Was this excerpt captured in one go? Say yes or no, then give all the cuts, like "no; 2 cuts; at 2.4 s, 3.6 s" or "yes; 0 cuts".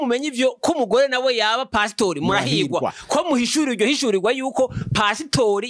yes; 0 cuts